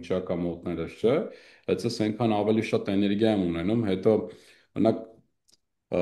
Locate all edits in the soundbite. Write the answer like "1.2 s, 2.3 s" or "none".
none

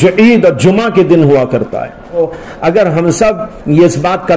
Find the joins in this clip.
2.2 s

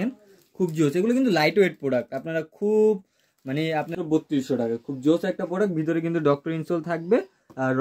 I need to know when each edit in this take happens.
3.9 s

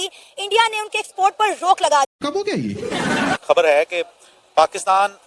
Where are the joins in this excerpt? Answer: 3.4 s

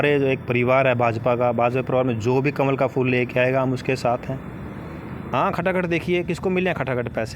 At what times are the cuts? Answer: 5.2 s

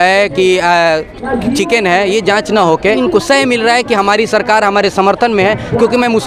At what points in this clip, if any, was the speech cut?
3.0 s

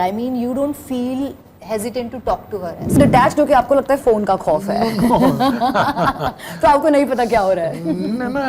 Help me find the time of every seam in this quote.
3.0 s

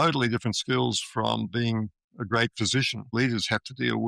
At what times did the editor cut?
3.1 s

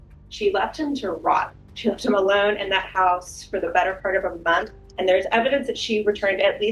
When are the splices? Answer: 1.6 s, 4.8 s

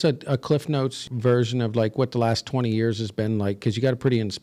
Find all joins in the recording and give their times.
1.0 s

